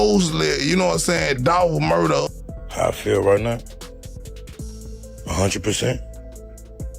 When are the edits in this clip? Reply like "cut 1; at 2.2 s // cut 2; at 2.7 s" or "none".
cut 1; at 2.4 s